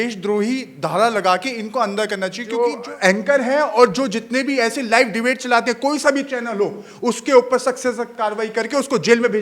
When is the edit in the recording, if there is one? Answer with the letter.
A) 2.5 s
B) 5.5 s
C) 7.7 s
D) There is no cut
A